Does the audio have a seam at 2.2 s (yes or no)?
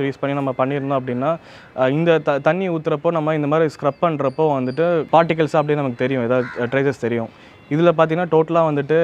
no